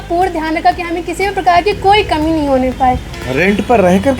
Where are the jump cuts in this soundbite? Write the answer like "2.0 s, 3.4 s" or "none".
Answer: 3.2 s